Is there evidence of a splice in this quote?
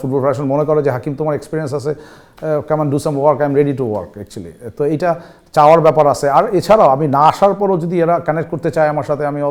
no; 0 cuts

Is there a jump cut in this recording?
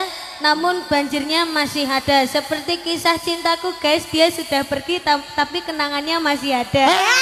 no; 0 cuts

